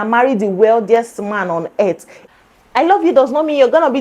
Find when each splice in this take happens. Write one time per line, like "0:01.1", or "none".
0:02.1